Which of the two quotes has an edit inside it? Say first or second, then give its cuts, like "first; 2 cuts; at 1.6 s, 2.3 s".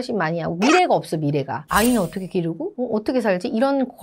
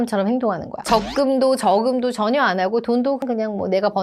first; 1 cut; at 1.6 s